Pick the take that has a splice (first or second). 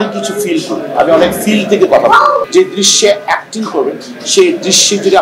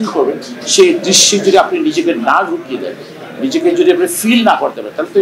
first